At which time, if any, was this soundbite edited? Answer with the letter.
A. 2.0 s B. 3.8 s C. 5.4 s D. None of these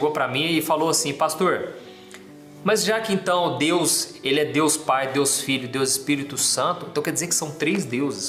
D